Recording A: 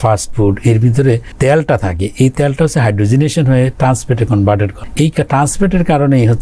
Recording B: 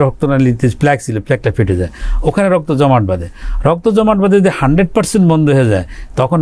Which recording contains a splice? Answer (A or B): A